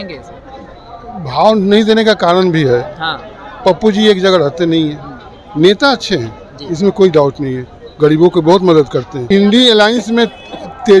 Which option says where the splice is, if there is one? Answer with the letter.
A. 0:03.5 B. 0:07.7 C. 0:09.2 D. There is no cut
C